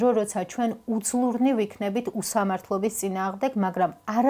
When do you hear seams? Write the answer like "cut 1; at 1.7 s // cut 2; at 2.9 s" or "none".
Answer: none